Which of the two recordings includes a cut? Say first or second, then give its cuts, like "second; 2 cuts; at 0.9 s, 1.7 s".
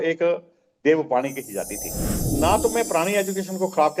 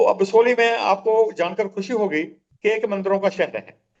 first; 1 cut; at 2.0 s